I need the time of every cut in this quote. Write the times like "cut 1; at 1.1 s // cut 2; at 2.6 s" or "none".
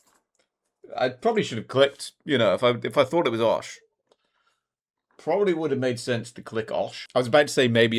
cut 1; at 7.0 s